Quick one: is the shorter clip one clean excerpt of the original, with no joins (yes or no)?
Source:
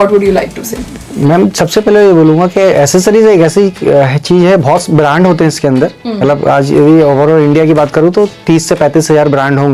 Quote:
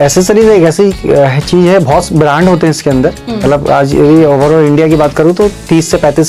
yes